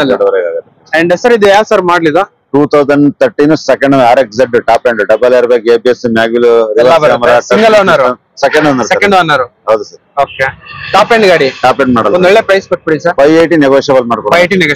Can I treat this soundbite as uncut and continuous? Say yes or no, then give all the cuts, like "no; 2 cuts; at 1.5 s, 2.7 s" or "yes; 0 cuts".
yes; 0 cuts